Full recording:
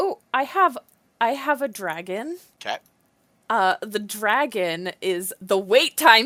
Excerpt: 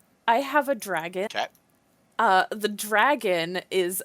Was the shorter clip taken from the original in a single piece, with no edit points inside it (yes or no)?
no